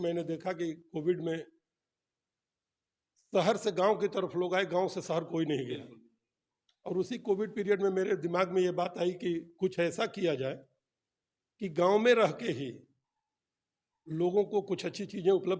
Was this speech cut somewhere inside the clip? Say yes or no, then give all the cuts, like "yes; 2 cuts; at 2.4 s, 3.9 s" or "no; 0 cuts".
no; 0 cuts